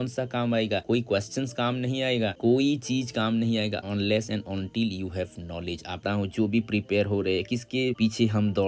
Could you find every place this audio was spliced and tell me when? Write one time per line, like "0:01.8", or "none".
0:03.8
0:06.0